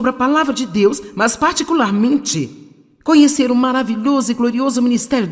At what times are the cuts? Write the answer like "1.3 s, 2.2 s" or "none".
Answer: none